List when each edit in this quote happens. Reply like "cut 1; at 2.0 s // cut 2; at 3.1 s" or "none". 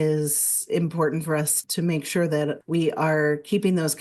cut 1; at 1.6 s // cut 2; at 2.6 s